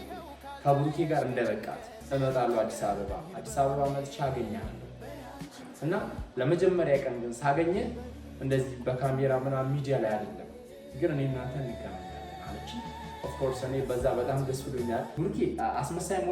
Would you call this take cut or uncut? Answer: cut